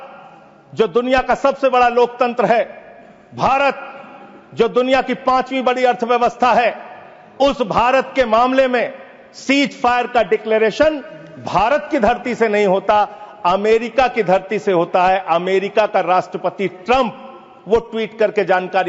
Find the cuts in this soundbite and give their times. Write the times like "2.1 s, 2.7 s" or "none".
none